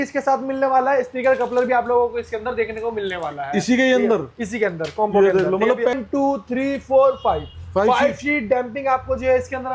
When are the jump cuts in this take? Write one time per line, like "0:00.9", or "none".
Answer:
0:05.9